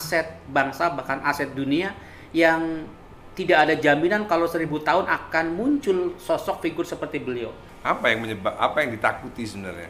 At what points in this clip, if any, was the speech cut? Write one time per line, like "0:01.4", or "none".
0:07.7